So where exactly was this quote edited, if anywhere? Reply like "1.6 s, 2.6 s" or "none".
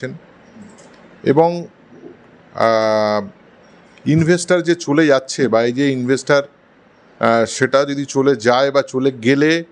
none